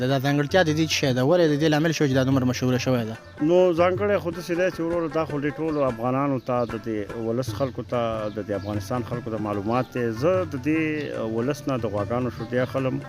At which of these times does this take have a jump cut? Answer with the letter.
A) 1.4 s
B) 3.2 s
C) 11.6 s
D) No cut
D